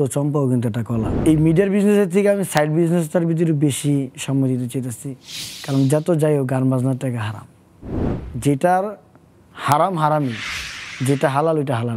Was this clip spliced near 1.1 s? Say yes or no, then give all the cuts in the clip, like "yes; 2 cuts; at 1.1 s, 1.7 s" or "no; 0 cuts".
yes; 1 cut; at 1.1 s